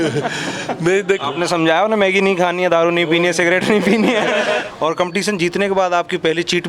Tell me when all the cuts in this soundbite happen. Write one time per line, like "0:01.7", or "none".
0:01.2
0:04.6